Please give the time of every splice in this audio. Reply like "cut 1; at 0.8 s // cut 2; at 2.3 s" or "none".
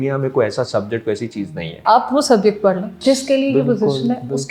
cut 1; at 1.8 s // cut 2; at 2.9 s